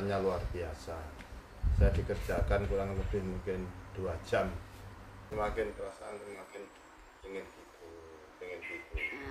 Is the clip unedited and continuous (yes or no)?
no